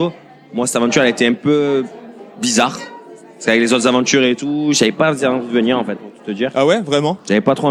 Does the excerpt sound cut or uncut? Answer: uncut